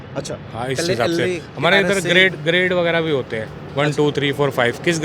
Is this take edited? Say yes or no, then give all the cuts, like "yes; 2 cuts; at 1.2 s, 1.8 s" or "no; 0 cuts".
no; 0 cuts